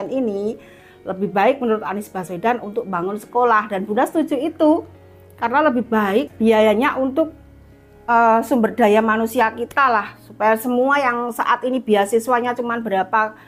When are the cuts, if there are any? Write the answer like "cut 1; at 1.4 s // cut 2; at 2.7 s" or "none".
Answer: none